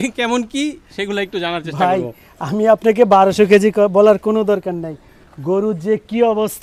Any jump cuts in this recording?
no; 0 cuts

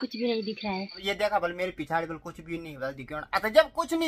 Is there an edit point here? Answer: yes; 1 cut; at 0.9 s

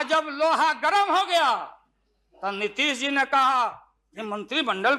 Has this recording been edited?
no; 0 cuts

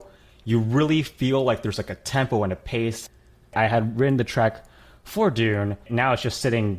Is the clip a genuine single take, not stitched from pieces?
no; 2 cuts; at 3.5 s, 5.9 s

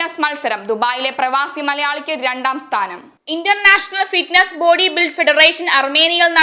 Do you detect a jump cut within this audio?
no; 0 cuts

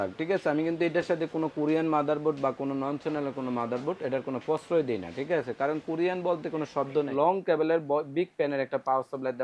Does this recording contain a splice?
yes; 1 cut; at 7.1 s

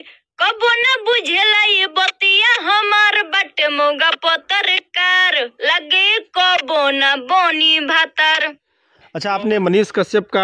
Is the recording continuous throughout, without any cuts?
no; 1 cut; at 8.5 s

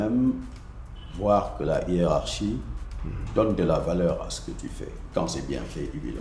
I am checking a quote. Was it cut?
no; 0 cuts

